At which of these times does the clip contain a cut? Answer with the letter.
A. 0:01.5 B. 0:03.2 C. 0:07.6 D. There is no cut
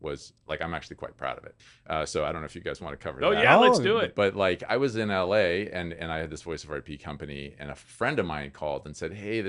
A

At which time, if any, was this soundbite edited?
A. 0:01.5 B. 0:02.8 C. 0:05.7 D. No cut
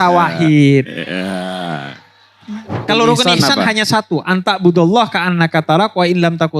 B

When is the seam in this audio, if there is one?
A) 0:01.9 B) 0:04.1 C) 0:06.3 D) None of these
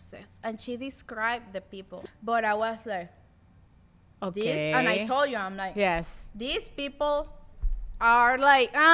A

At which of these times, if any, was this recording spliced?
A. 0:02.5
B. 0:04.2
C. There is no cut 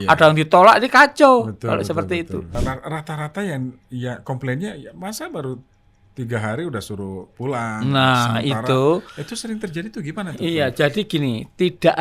A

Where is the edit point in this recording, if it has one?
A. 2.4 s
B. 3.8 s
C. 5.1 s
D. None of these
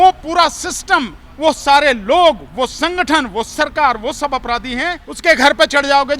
C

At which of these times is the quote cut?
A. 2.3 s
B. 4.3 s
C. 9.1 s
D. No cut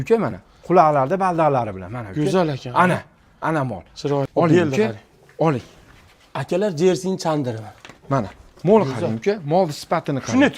B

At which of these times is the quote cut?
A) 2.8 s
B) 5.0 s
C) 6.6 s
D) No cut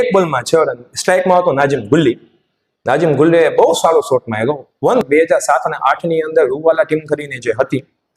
B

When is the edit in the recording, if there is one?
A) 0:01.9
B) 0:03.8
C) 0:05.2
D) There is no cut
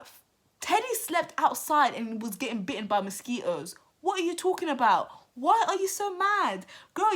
D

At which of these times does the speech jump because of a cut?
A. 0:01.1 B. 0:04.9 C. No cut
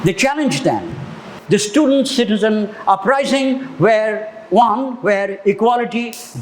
A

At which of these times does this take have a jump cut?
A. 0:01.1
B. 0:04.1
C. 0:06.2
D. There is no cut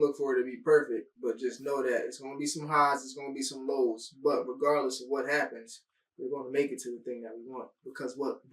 A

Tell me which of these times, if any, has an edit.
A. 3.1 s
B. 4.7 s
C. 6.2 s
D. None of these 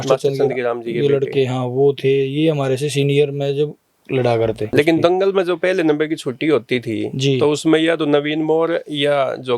B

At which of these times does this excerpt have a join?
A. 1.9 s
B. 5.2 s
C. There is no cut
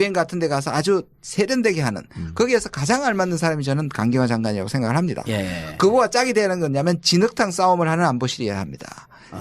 B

